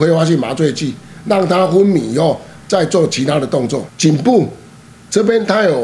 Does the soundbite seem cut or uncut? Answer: cut